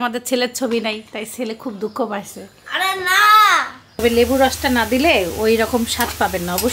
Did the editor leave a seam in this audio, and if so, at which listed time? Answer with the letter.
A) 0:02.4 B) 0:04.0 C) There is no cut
B